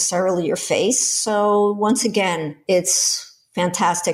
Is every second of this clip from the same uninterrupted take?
yes; 0 cuts

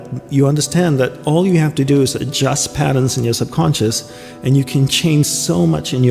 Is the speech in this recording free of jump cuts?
yes; 0 cuts

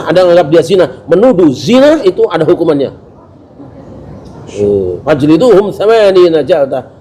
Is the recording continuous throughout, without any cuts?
no; 1 cut; at 3.5 s

